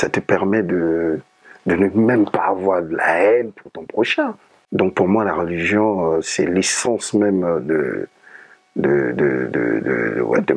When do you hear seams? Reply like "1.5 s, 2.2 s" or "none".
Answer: 4.5 s